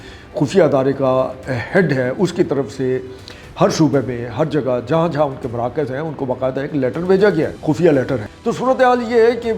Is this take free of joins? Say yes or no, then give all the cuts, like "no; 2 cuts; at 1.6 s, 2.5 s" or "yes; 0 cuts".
no; 2 cuts; at 7.6 s, 8.2 s